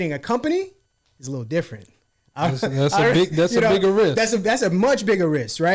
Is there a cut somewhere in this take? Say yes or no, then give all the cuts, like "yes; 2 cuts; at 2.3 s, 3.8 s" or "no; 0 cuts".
no; 0 cuts